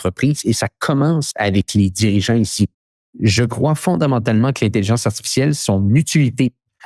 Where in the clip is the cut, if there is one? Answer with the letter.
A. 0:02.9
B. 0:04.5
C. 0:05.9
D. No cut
A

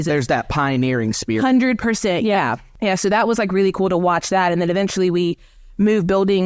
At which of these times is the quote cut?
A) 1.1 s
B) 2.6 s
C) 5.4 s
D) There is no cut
B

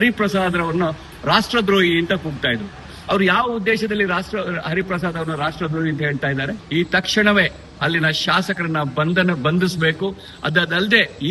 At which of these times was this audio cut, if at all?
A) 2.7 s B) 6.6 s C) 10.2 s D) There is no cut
B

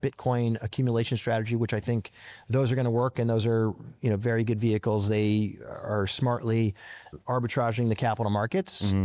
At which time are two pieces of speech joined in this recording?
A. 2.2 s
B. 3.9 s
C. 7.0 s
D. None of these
C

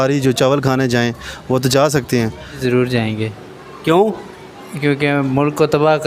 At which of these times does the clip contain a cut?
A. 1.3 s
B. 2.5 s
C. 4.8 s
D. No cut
B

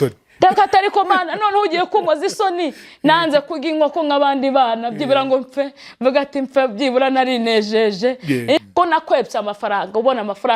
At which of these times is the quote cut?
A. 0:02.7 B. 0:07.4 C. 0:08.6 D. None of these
C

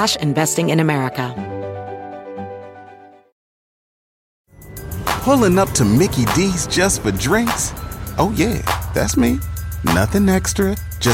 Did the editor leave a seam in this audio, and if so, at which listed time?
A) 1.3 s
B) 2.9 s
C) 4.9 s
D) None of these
A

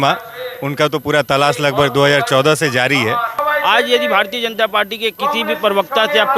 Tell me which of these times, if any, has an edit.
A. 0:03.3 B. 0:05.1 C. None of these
A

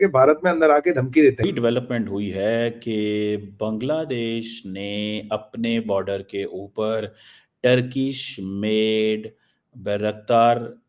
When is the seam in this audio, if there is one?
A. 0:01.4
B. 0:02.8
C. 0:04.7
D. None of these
A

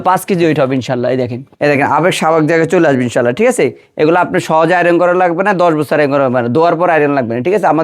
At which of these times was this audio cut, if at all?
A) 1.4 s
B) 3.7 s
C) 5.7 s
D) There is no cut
A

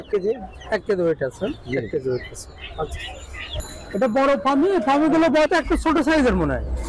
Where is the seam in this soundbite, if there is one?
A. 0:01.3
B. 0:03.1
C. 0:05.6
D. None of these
C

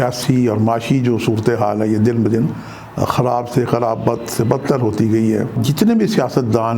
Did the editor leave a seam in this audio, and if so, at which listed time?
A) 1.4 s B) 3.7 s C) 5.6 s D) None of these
C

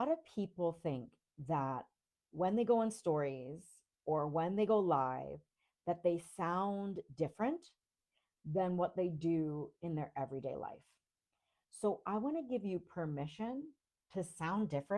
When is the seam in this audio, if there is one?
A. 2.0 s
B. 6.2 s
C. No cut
C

